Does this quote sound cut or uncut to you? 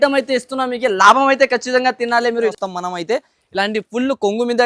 cut